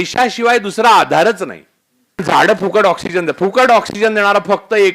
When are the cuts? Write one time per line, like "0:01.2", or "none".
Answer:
0:02.2